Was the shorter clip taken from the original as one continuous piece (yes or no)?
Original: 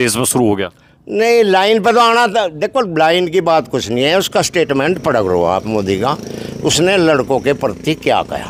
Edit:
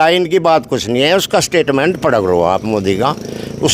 yes